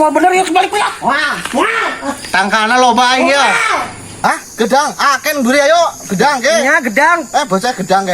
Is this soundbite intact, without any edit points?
no; 1 cut; at 4.4 s

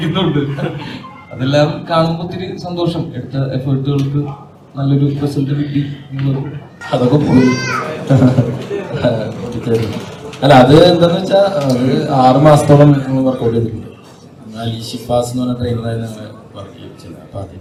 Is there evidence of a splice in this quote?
no; 0 cuts

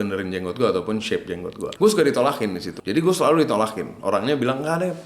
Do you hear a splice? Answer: yes; 2 cuts; at 1.7 s, 2.7 s

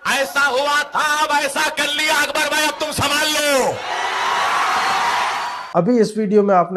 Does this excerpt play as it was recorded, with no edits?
yes; 0 cuts

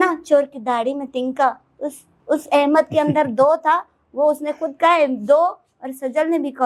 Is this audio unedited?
yes; 0 cuts

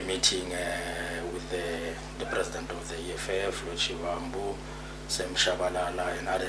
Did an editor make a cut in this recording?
no; 0 cuts

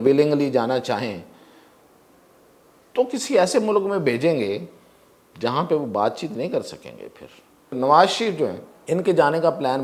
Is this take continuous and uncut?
no; 2 cuts; at 7.8 s, 8.7 s

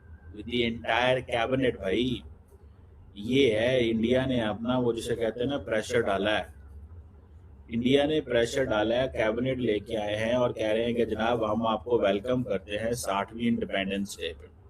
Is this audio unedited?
yes; 0 cuts

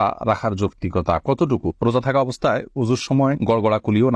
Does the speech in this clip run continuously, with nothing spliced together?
no; 1 cut; at 1.7 s

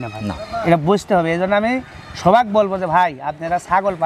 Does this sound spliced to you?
no; 0 cuts

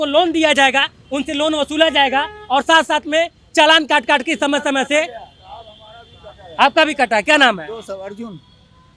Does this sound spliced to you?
no; 0 cuts

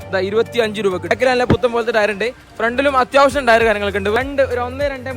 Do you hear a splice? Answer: yes; 2 cuts; at 1.1 s, 4.2 s

